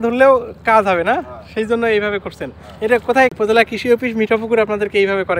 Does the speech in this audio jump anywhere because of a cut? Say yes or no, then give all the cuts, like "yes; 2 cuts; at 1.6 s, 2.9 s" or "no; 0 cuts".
yes; 1 cut; at 3.1 s